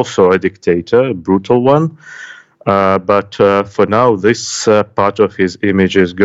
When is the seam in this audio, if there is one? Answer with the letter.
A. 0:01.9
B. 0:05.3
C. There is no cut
C